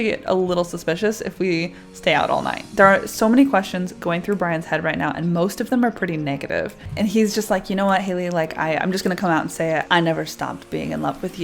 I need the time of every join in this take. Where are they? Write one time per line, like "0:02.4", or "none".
0:02.6
0:06.9
0:09.9